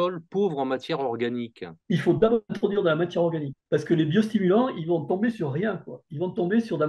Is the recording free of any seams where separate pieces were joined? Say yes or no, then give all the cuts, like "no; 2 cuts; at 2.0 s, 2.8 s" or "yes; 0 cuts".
no; 2 cuts; at 1.7 s, 3.5 s